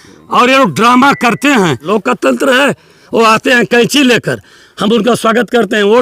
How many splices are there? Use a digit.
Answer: 1